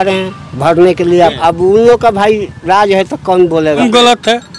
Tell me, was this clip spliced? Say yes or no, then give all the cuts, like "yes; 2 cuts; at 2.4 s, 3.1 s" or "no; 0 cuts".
yes; 2 cuts; at 1.3 s, 3.8 s